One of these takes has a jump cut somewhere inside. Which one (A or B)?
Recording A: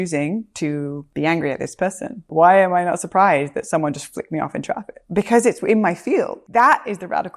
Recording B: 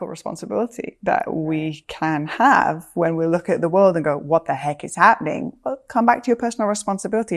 A